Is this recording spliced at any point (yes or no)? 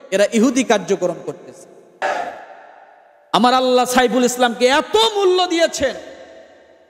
yes